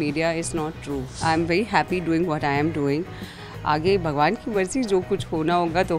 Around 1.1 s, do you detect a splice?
yes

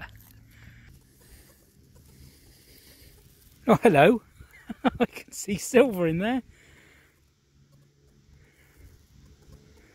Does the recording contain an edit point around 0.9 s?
yes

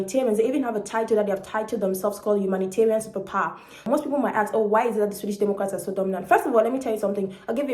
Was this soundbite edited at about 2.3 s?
no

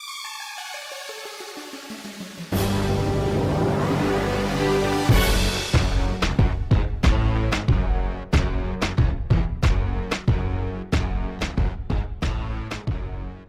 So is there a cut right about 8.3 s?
no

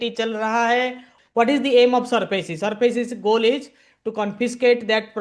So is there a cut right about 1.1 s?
yes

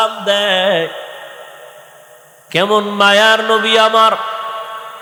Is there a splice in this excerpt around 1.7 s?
no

